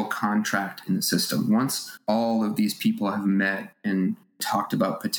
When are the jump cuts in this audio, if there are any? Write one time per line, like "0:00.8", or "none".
none